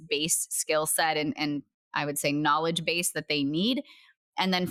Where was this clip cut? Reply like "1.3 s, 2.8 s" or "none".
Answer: none